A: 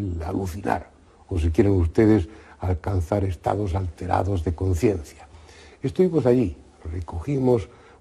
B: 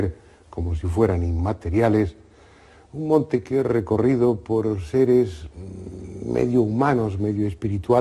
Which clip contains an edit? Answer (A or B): B